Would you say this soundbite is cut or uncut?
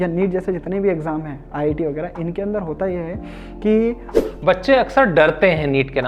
cut